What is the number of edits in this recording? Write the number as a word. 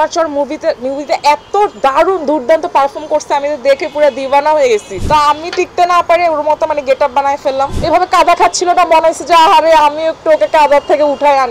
two